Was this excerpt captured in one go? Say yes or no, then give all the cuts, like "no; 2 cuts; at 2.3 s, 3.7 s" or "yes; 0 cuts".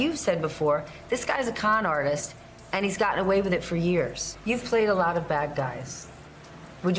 yes; 0 cuts